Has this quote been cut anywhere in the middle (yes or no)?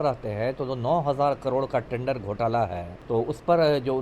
yes